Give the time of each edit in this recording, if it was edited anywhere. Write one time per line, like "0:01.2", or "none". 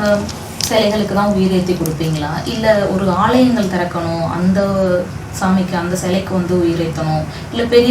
none